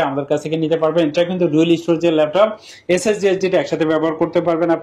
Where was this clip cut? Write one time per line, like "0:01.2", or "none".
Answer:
none